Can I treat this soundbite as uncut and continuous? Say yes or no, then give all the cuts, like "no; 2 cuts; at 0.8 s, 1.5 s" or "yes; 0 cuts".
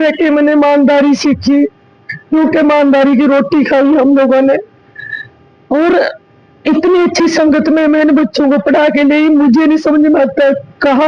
yes; 0 cuts